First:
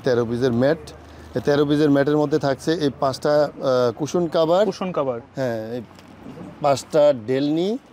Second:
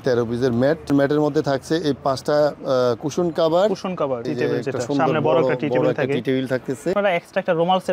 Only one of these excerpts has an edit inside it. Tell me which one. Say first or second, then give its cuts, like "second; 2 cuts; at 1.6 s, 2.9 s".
second; 3 cuts; at 0.9 s, 4.3 s, 6.9 s